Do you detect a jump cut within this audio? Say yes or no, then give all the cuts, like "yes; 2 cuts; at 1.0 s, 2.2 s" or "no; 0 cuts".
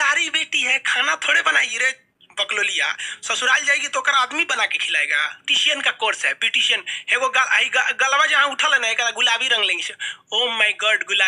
yes; 1 cut; at 5.4 s